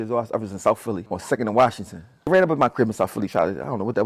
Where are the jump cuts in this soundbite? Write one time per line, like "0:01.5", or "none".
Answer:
0:01.1
0:02.3